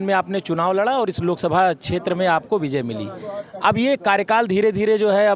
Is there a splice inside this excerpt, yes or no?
no